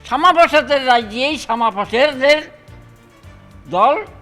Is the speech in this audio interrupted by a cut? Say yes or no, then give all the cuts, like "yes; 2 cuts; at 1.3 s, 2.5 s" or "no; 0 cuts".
no; 0 cuts